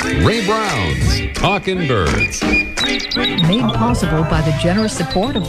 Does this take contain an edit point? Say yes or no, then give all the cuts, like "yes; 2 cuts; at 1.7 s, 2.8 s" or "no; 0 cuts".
no; 0 cuts